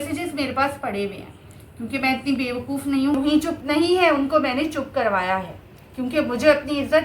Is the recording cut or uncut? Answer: cut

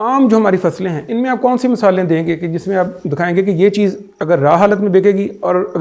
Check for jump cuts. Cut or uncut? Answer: uncut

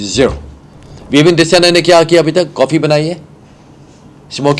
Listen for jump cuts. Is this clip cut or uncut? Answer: cut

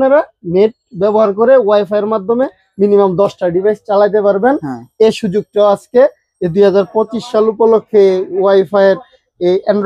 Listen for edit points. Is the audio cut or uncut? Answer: uncut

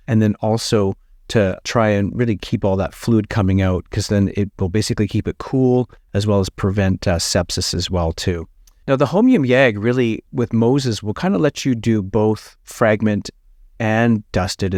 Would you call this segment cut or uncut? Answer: uncut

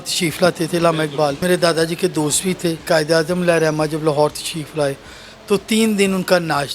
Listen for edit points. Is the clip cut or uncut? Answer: cut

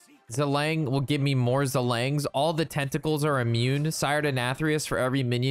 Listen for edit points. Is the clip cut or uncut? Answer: uncut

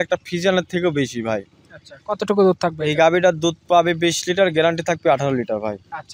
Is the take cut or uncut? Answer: uncut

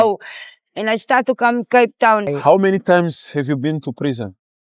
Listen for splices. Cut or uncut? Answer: cut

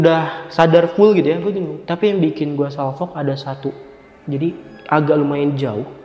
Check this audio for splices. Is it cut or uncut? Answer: cut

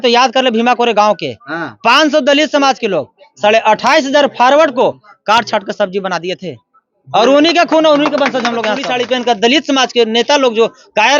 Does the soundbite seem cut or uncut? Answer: cut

